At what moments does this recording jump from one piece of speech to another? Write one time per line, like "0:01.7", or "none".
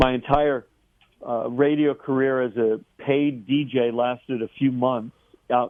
none